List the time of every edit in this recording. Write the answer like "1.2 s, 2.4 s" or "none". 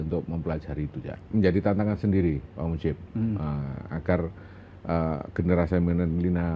1.2 s